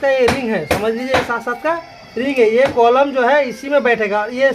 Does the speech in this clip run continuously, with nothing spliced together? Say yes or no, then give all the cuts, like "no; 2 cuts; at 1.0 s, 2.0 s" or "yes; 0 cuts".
yes; 0 cuts